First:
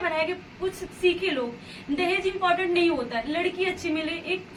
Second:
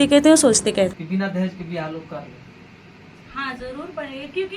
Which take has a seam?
second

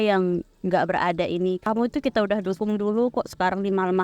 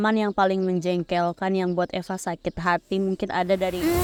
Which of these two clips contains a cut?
first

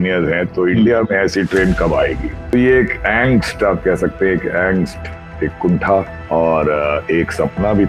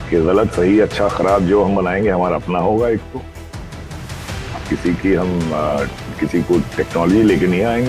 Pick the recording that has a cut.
first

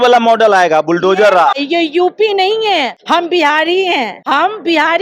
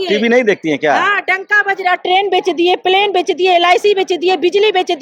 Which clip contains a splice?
first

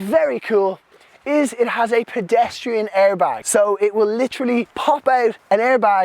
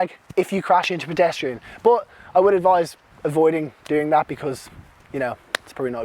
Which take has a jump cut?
first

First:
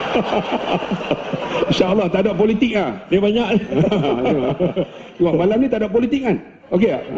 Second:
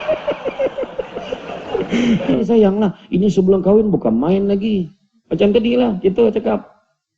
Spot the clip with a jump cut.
second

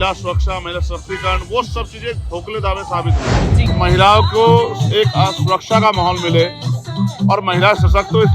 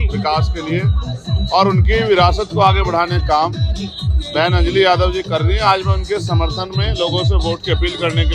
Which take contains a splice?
first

